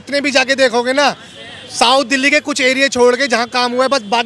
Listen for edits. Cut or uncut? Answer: uncut